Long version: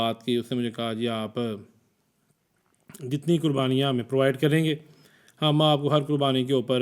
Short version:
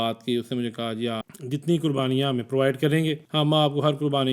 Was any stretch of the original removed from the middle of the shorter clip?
yes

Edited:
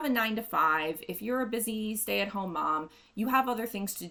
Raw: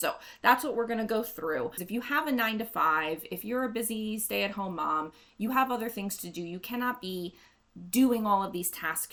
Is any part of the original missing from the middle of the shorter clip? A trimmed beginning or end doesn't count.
no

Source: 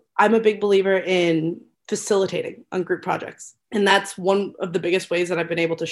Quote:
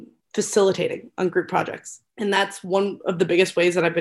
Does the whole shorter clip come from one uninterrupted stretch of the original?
yes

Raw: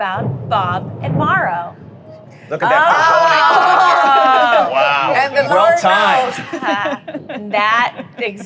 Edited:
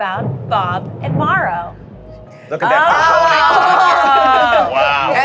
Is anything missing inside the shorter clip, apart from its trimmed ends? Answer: no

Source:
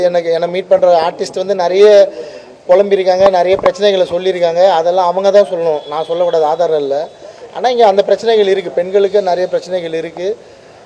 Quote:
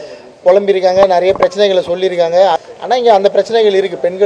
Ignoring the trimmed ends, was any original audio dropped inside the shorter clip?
yes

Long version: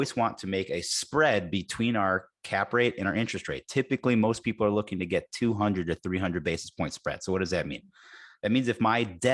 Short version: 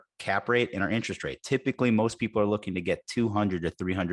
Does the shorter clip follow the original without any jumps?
yes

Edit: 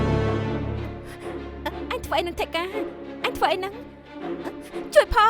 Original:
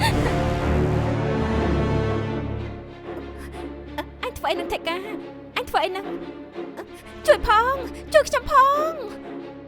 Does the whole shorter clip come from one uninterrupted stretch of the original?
no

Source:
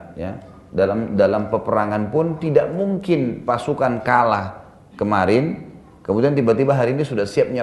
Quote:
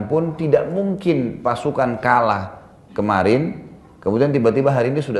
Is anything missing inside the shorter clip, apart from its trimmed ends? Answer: no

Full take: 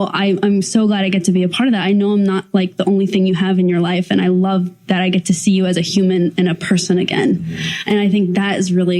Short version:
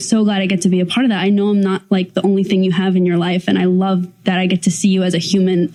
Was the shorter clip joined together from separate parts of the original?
no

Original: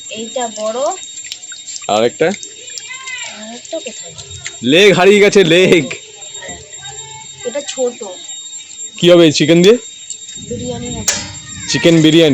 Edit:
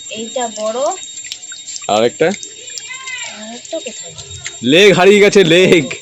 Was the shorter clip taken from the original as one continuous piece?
yes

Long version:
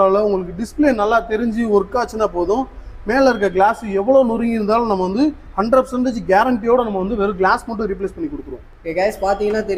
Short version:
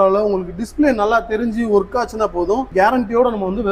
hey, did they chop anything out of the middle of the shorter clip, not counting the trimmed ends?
yes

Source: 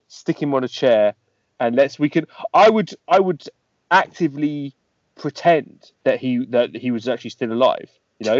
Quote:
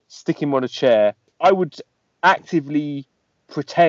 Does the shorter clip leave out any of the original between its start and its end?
yes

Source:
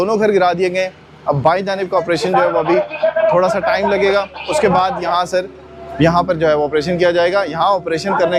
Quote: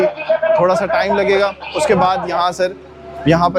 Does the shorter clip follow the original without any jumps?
yes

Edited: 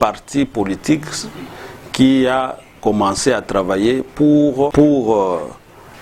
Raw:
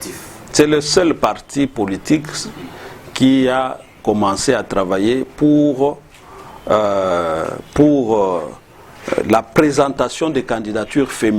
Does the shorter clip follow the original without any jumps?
no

